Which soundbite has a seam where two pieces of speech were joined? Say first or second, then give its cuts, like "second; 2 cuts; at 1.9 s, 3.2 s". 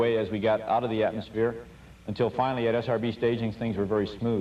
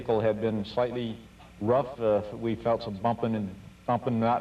second; 1 cut; at 1.5 s